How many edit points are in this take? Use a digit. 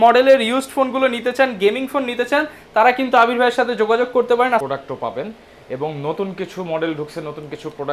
1